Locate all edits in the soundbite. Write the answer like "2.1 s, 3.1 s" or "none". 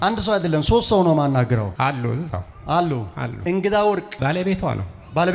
none